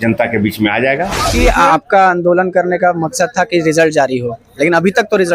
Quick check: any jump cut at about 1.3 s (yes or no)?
yes